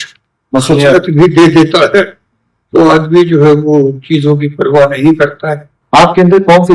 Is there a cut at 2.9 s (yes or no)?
no